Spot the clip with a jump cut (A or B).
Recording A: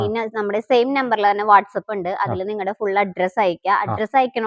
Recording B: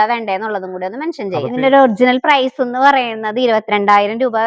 B